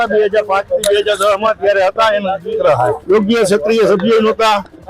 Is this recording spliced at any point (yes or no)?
yes